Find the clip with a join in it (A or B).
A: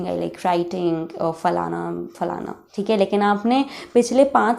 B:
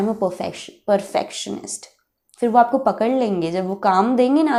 A